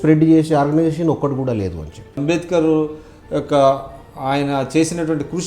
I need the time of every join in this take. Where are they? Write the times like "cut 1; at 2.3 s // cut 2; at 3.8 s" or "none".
cut 1; at 2.2 s